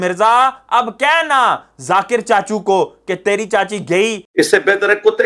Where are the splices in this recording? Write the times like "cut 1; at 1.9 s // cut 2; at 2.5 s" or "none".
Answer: cut 1; at 4.2 s